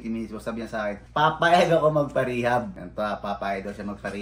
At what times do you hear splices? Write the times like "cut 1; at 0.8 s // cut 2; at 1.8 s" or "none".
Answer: cut 1; at 1.0 s // cut 2; at 2.8 s